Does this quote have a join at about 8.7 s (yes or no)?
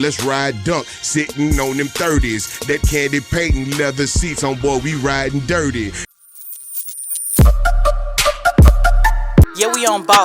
no